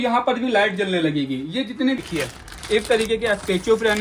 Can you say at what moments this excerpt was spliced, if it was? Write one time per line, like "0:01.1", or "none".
0:02.0